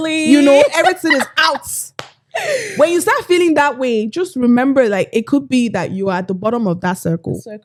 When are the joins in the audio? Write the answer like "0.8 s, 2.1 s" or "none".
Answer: none

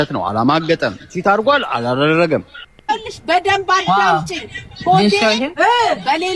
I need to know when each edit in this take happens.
2.8 s

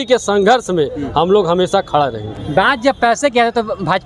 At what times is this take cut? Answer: none

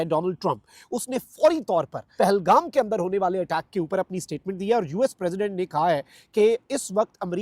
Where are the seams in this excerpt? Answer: 2.0 s

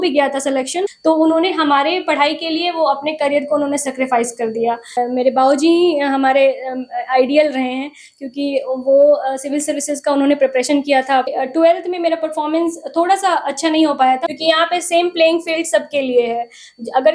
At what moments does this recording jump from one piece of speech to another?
0.9 s, 5.0 s, 11.3 s, 14.2 s

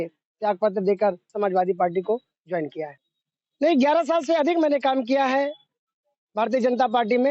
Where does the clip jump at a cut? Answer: 1.3 s, 3.0 s

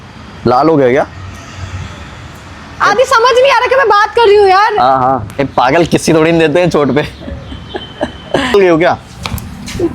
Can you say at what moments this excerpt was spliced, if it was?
5.3 s, 8.5 s

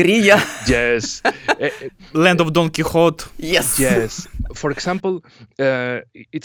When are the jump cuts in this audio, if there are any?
none

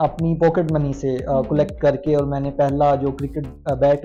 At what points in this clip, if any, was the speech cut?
none

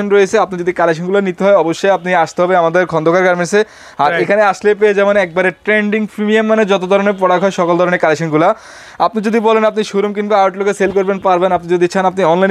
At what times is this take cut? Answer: none

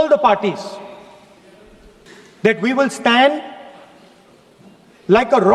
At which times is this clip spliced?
2.1 s

